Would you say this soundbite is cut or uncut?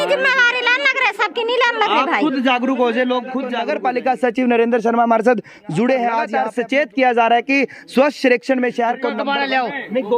cut